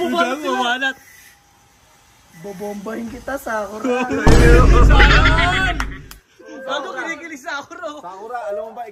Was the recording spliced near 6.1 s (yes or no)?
no